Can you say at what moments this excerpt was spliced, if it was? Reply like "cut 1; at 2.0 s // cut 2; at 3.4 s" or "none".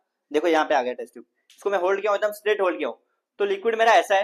none

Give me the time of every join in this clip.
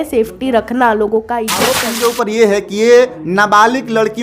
cut 1; at 1.9 s

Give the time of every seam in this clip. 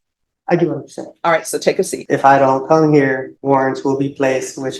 cut 1; at 2.0 s // cut 2; at 3.3 s

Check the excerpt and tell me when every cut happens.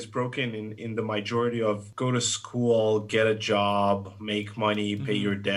cut 1; at 1.9 s

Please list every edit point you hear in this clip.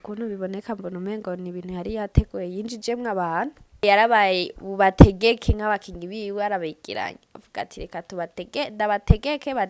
cut 1; at 3.8 s

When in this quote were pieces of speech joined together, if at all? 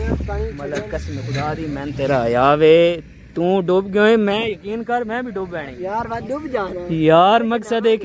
none

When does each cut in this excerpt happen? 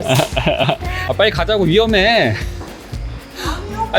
cut 1; at 0.9 s

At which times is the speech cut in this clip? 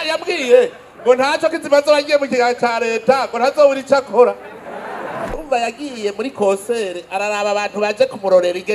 cut 1; at 5.4 s

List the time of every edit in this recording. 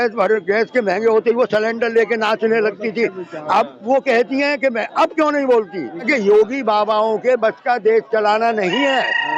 cut 1; at 6.1 s

